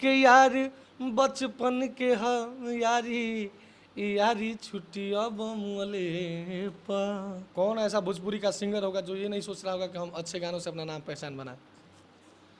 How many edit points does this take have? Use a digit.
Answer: 1